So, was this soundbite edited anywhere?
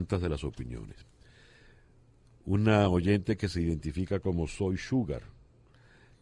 no; 0 cuts

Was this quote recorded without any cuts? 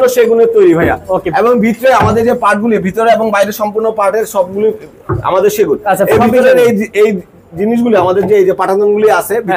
yes; 0 cuts

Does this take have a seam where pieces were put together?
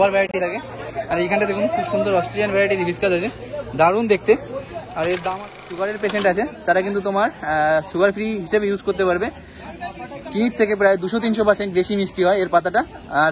yes; 1 cut; at 5.6 s

